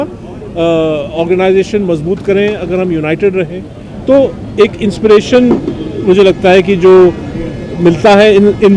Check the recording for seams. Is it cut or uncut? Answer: uncut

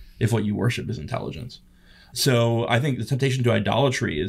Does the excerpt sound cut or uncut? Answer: cut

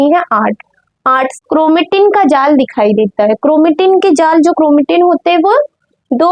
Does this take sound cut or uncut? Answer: cut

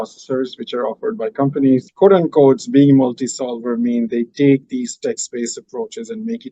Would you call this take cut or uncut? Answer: cut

